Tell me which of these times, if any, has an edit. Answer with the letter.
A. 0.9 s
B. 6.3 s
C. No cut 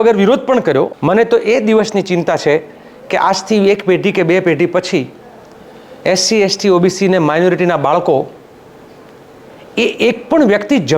A